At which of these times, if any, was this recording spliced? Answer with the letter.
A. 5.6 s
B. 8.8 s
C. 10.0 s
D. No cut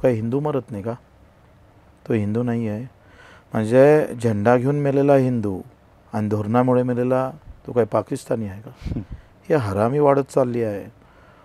D